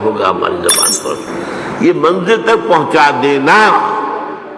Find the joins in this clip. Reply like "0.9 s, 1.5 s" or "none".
1.3 s